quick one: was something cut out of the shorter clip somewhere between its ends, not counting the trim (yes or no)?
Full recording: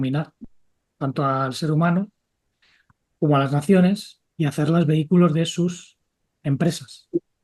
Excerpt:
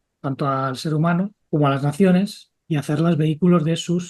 yes